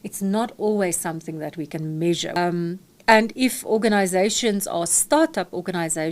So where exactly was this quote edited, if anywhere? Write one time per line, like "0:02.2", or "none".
0:02.4

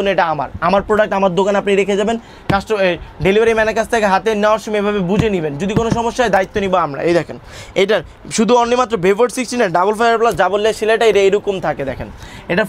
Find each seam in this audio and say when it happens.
none

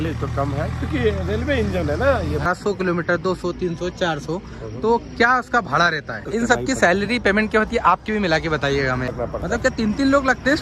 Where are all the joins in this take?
0:02.4
0:06.3
0:09.1

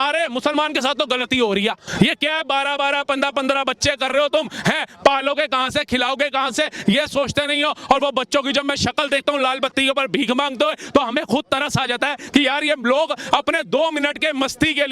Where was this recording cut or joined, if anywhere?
0:01.8

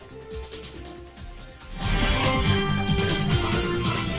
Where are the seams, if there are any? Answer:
none

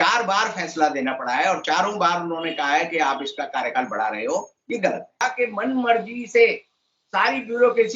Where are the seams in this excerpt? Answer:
0:05.3

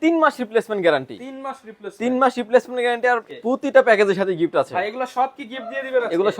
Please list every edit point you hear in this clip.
0:03.2

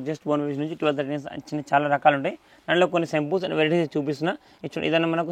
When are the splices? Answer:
none

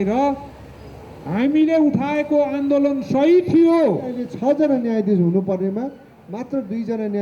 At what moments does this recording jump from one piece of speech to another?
0:04.2

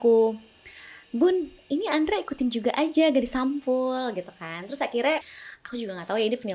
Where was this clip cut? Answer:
0:05.2

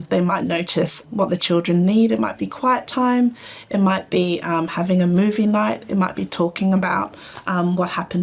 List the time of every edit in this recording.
none

